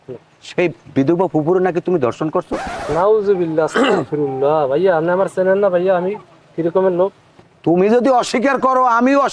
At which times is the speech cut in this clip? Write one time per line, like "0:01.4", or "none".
none